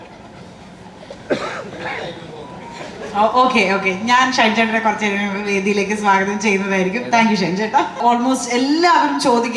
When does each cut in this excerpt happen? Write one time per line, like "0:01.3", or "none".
0:08.0